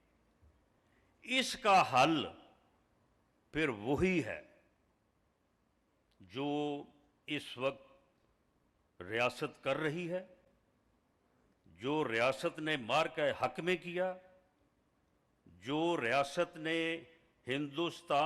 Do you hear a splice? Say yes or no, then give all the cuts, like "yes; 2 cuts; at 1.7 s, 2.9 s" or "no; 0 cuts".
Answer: no; 0 cuts